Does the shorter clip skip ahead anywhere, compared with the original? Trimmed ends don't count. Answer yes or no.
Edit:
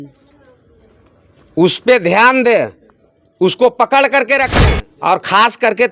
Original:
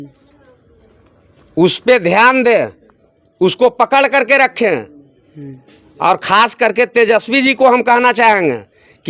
yes